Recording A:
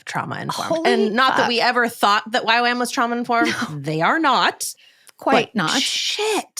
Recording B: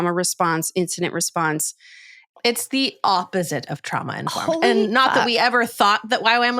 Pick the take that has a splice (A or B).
B